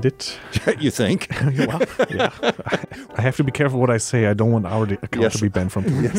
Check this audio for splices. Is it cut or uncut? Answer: cut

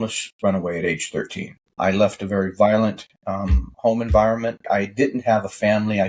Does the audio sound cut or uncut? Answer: cut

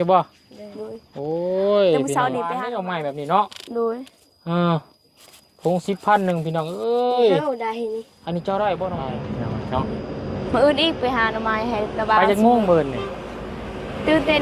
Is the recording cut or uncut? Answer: cut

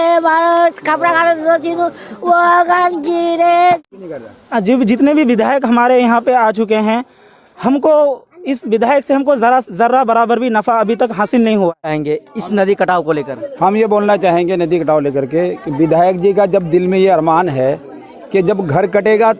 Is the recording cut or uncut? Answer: cut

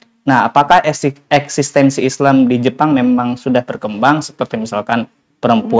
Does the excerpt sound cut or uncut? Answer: uncut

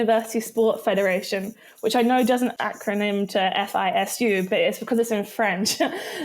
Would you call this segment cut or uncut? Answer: cut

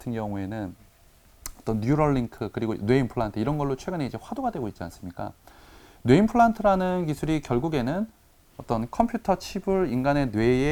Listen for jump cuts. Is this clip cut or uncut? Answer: uncut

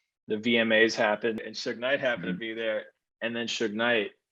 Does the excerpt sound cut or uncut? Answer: cut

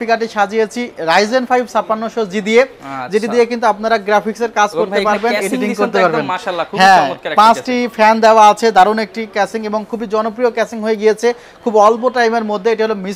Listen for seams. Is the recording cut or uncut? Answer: uncut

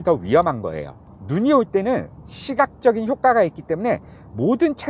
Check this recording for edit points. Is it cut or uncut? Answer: uncut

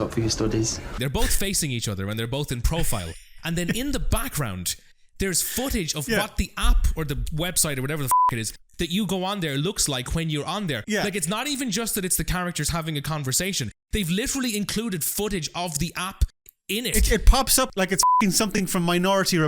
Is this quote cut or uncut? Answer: cut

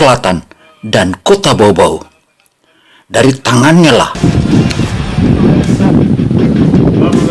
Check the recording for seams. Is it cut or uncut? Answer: cut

